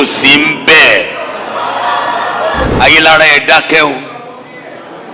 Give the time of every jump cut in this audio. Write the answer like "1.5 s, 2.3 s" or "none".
2.7 s